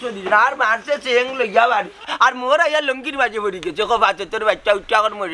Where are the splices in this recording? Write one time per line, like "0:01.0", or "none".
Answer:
none